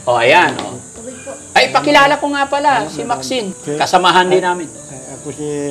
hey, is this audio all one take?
no; 1 cut; at 3.6 s

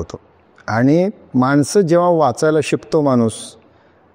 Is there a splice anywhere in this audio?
no; 0 cuts

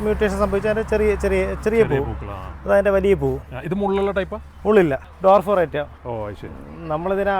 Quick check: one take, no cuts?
no; 1 cut; at 5.1 s

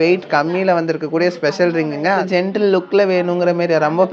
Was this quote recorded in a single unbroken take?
no; 1 cut; at 2.2 s

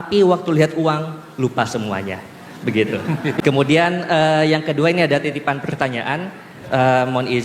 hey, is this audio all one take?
no; 1 cut; at 3.4 s

